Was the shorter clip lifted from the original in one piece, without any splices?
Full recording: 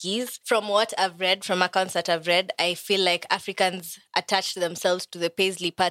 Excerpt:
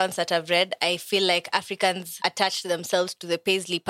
no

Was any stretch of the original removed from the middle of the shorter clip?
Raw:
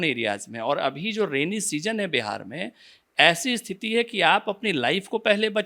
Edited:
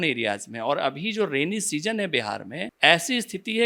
yes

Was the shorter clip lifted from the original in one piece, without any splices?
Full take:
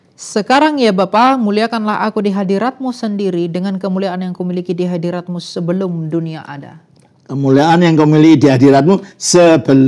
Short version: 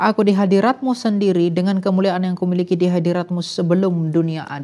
yes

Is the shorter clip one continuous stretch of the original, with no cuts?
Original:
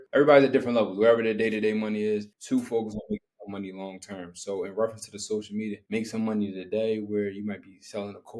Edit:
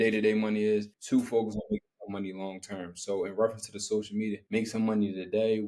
yes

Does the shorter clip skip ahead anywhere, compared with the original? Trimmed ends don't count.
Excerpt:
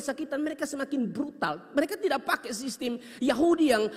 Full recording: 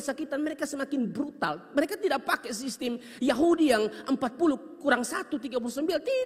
no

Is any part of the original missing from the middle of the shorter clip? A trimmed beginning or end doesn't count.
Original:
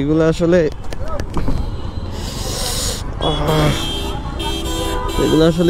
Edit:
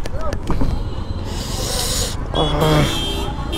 no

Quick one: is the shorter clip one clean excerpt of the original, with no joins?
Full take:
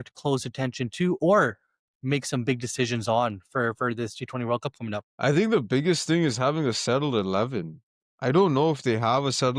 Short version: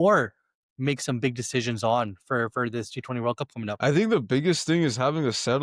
no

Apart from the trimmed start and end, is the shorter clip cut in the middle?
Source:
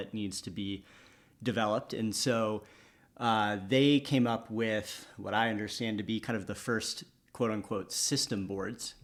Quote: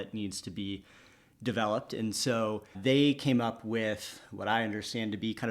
yes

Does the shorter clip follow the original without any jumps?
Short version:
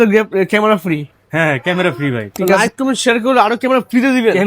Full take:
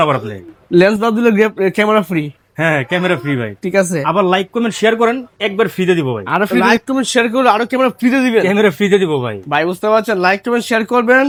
no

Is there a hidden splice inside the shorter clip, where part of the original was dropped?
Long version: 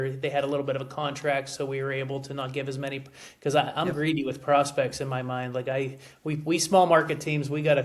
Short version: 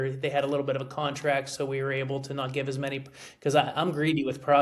no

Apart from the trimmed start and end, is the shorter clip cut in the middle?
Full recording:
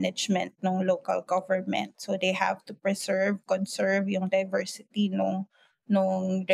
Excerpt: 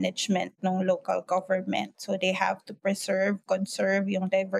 no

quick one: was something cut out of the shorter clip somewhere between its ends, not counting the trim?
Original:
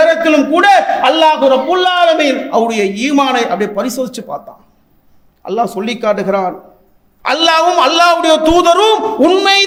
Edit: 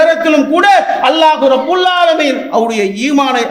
no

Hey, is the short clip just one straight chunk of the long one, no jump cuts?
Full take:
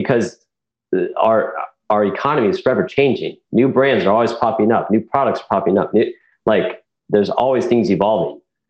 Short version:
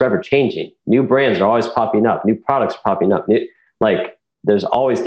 yes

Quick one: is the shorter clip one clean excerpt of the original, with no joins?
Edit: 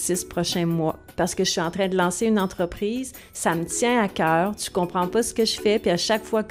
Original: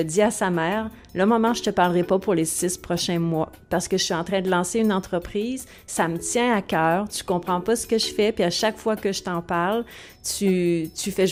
yes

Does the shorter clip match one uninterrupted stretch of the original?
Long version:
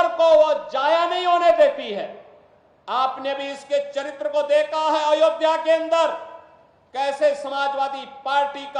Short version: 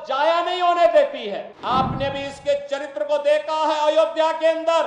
no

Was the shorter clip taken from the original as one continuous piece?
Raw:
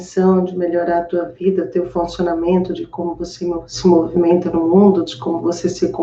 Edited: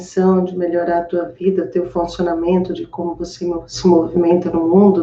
yes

